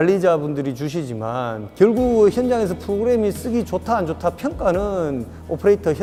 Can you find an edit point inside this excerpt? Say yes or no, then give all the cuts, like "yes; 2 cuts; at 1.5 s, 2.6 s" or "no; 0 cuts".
no; 0 cuts